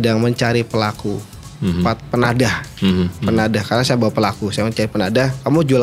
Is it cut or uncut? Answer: uncut